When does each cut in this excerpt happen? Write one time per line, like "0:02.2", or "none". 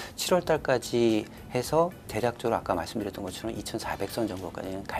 none

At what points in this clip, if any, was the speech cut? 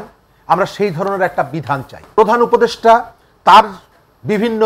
0:02.0

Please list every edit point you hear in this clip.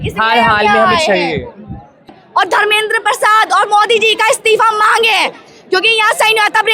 0:02.2

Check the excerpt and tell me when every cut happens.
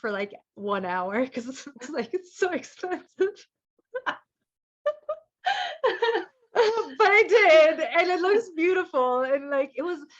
none

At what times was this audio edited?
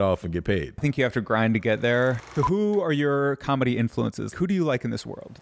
0:00.8
0:02.2
0:04.3

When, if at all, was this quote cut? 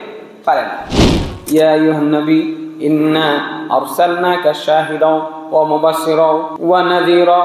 0:01.3
0:06.5

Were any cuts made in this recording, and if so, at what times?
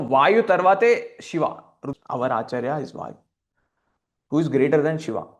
0:02.0

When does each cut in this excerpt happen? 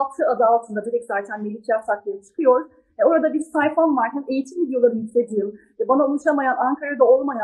none

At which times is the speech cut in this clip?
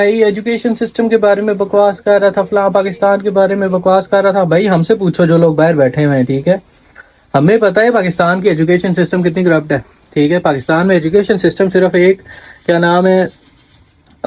none

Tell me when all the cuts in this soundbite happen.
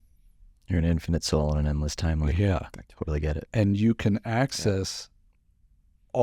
none

